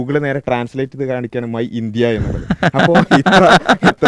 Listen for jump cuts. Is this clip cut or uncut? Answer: uncut